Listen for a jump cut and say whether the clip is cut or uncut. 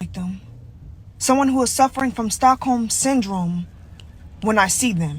uncut